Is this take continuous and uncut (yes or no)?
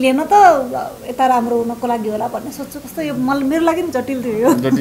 yes